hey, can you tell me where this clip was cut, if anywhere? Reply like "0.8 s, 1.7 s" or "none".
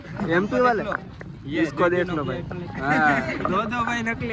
2.7 s